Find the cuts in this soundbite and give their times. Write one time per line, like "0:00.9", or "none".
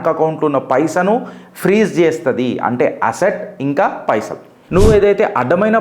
0:04.6